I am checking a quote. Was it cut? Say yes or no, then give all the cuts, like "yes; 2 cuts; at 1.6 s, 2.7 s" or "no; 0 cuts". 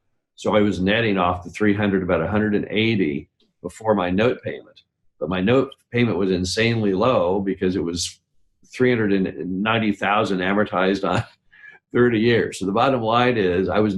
no; 0 cuts